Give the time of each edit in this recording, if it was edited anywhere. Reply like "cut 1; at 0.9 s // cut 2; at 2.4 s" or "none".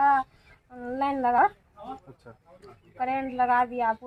none